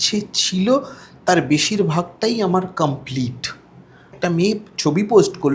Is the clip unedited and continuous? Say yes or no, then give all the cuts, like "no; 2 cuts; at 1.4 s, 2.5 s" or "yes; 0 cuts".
no; 1 cut; at 4.1 s